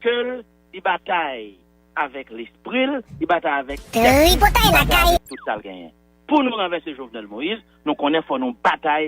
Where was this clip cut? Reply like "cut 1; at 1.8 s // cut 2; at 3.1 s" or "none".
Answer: cut 1; at 3.9 s // cut 2; at 5.2 s

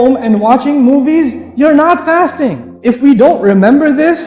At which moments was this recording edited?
cut 1; at 2.7 s

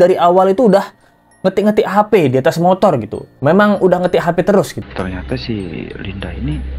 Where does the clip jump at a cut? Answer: cut 1; at 4.8 s

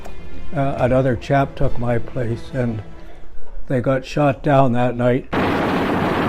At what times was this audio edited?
cut 1; at 5.3 s

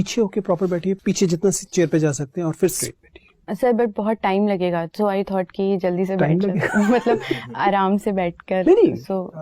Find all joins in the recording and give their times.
cut 1; at 1.0 s // cut 2; at 2.8 s

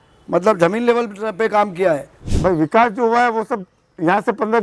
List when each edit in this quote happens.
cut 1; at 2.3 s

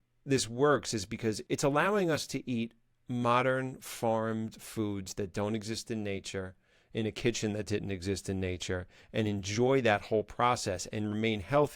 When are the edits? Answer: cut 1; at 1.4 s

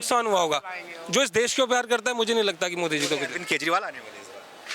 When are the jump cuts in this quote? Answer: none

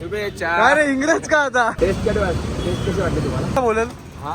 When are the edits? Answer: cut 1; at 1.8 s // cut 2; at 3.5 s

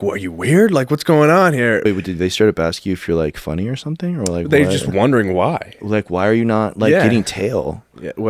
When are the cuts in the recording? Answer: cut 1; at 1.8 s

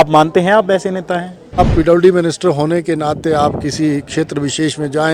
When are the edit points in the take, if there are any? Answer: cut 1; at 1.6 s

